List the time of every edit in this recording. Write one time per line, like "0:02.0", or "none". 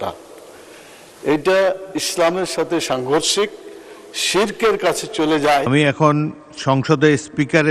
0:05.7